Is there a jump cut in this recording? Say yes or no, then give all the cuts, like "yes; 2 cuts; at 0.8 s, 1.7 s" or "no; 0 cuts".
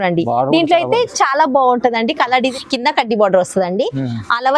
yes; 1 cut; at 2.5 s